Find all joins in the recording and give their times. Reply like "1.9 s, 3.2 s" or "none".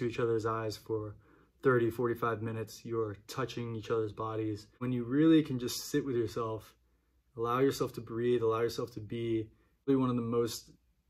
4.8 s, 9.9 s